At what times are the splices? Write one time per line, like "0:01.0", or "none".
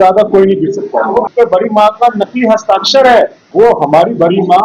0:01.3
0:03.4